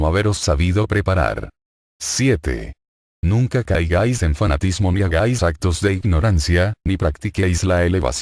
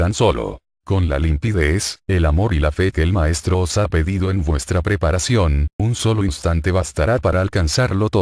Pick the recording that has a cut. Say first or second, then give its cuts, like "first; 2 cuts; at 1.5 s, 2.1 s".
second; 1 cut; at 3.1 s